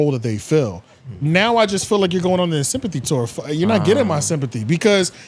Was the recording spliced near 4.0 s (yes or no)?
no